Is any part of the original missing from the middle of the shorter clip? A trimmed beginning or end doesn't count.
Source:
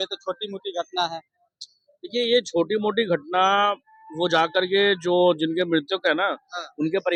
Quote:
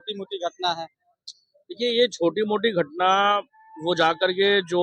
no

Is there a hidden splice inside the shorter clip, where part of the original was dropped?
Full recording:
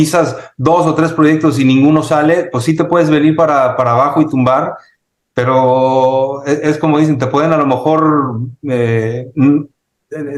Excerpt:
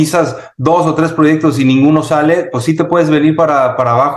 no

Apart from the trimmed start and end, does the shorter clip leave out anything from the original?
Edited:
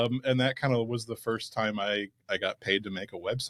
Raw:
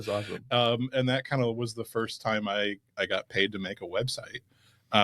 no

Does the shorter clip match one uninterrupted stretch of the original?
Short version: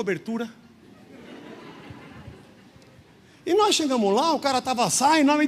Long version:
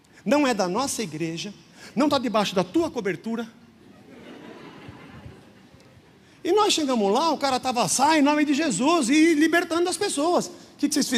yes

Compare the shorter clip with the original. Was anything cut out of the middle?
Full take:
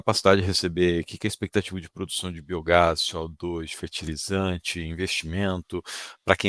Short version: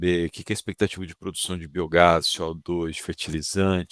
no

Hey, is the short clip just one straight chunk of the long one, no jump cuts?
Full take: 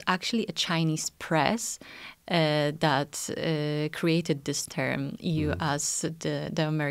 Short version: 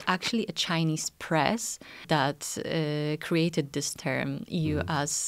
no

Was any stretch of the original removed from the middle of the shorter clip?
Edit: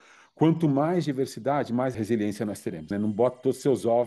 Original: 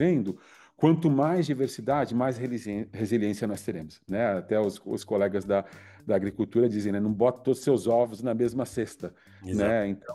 yes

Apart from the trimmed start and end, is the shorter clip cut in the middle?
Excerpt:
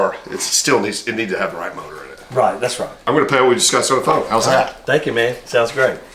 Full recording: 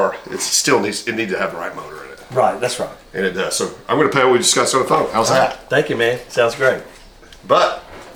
yes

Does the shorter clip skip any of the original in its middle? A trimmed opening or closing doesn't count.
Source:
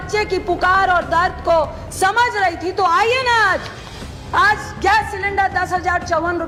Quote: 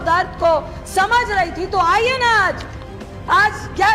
no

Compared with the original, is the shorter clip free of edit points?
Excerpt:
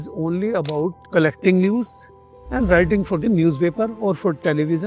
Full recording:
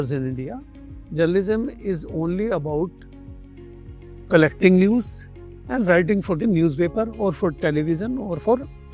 no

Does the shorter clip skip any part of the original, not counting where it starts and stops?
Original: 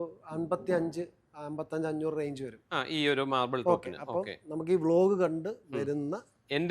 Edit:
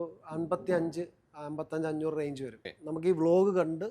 yes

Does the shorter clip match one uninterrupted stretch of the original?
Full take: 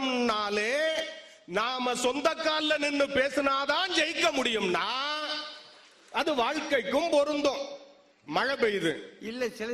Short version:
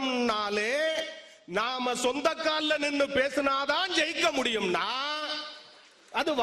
yes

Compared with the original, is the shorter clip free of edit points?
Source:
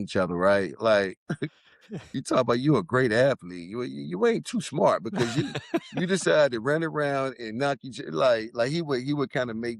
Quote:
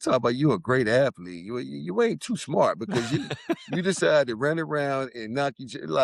yes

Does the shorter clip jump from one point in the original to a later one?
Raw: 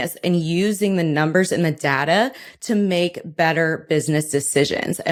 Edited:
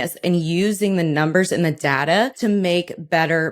yes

